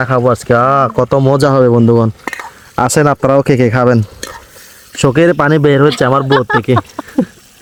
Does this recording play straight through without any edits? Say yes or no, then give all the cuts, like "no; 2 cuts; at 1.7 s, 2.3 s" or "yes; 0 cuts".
yes; 0 cuts